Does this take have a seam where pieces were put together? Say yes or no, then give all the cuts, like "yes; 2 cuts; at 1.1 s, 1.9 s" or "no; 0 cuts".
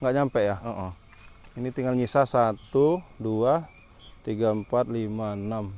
no; 0 cuts